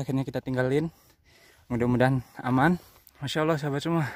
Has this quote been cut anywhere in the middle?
yes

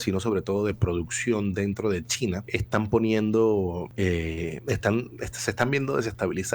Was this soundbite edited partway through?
yes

